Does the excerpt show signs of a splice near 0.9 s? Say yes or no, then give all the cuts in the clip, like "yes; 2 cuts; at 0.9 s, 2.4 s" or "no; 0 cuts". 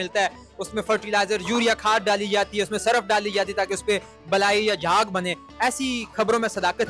no; 0 cuts